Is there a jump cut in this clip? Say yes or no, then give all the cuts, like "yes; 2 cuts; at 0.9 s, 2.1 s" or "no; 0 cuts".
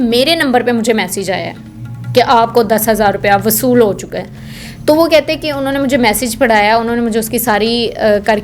no; 0 cuts